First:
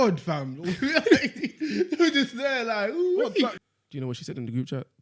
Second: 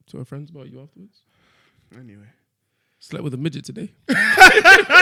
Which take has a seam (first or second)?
first